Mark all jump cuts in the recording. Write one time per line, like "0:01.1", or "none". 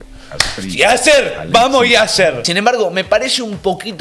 0:02.4